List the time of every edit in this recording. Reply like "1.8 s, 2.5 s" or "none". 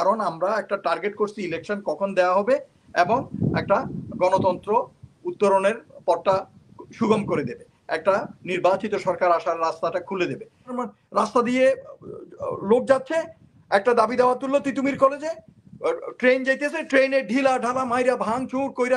10.8 s